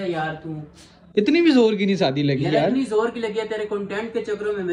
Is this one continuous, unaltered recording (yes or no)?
yes